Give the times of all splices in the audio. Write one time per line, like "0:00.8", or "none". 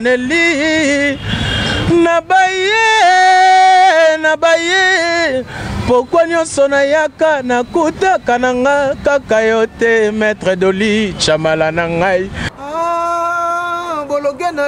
0:12.6